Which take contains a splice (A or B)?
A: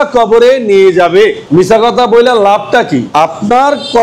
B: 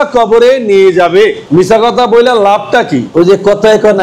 B